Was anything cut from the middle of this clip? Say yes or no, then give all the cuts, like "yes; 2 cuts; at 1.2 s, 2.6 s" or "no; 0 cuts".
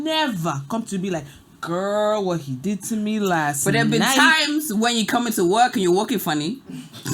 no; 0 cuts